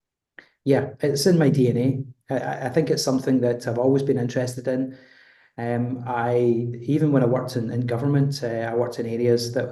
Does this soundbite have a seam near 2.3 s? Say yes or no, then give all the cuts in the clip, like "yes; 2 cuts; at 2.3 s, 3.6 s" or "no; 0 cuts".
no; 0 cuts